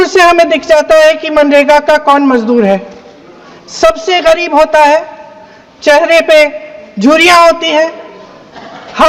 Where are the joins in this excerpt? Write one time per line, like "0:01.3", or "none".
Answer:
none